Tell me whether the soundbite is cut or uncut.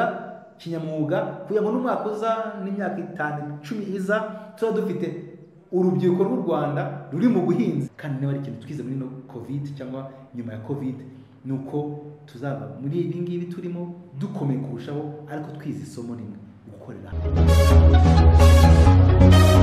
cut